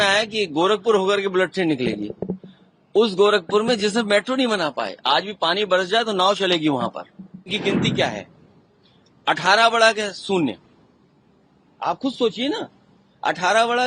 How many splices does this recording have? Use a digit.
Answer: 1